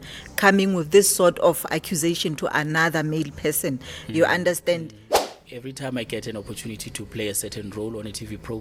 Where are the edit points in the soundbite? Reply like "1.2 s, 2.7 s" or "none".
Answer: 5.1 s